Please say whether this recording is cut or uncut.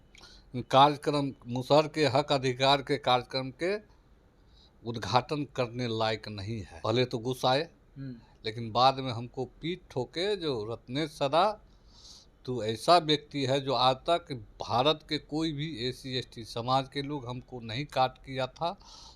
cut